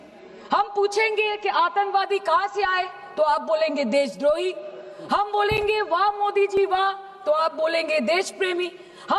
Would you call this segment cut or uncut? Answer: uncut